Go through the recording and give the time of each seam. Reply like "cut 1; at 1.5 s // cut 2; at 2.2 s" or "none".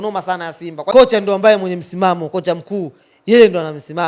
cut 1; at 0.9 s